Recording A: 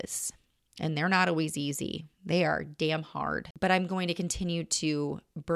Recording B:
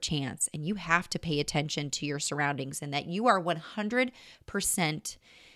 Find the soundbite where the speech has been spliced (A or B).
A